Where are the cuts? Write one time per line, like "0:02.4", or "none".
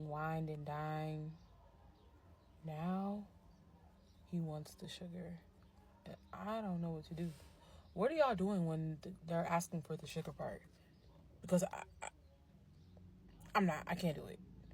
none

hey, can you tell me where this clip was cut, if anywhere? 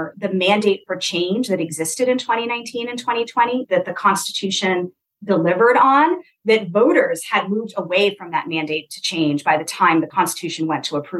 0:10.1

